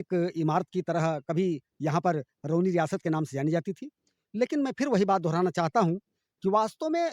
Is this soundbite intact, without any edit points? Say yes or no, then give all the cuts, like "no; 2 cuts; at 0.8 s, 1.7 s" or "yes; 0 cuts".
yes; 0 cuts